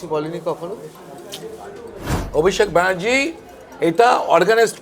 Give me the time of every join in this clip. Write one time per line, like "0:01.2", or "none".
0:02.2